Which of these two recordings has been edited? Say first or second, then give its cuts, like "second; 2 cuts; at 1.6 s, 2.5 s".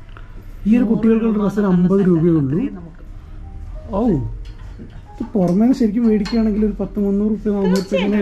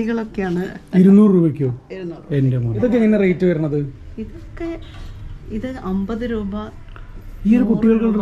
second; 1 cut; at 2.8 s